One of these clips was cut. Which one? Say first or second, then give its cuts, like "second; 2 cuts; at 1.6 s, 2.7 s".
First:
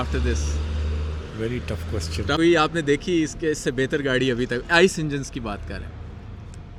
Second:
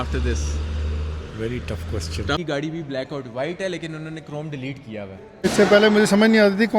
second; 2 cuts; at 2.4 s, 5.4 s